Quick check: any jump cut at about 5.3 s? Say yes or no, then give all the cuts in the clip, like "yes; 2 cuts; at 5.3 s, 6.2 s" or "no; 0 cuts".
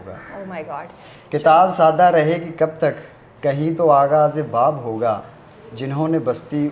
no; 0 cuts